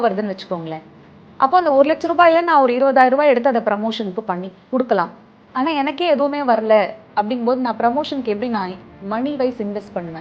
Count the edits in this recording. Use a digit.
0